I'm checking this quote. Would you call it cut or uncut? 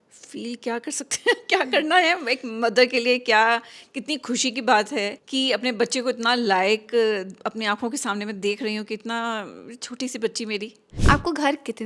cut